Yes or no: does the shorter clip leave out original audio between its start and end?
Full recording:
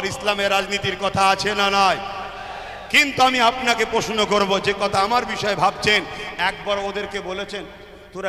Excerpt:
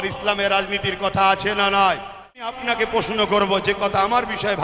yes